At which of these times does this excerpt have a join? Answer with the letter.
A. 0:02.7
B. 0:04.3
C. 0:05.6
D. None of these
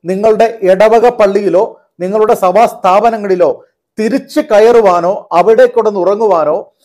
D